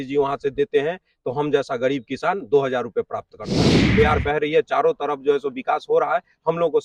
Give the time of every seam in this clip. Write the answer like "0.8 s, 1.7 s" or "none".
3.8 s